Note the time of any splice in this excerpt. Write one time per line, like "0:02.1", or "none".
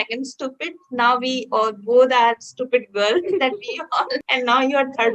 0:04.2